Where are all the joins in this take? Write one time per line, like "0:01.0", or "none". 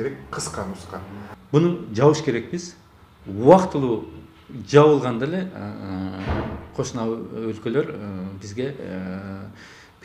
0:01.3

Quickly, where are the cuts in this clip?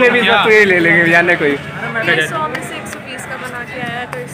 0:02.1

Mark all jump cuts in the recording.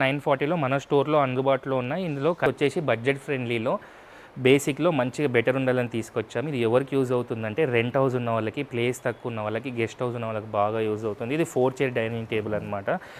0:02.5

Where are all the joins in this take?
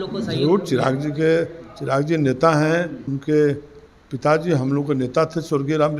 0:03.1

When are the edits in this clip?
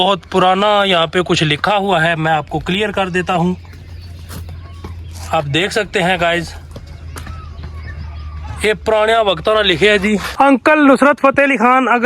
0:10.3

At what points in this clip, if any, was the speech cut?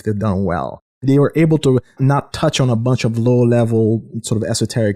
none

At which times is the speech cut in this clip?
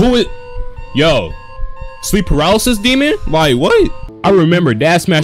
0:04.1

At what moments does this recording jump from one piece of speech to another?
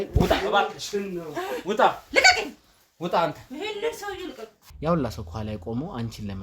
0:04.6

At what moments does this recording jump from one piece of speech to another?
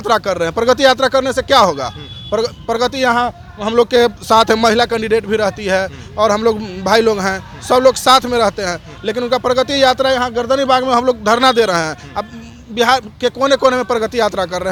none

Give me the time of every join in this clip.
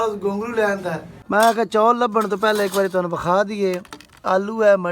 0:01.1

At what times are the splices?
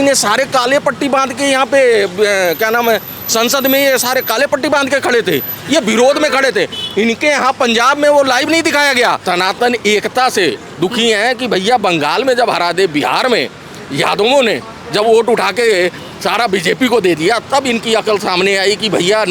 0:09.2

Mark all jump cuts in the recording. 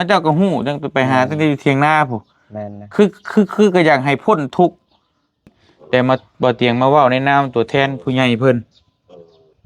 0:05.6

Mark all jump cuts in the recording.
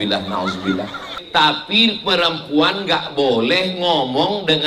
0:01.2

